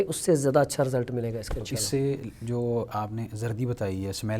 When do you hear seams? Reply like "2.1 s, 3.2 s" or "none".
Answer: none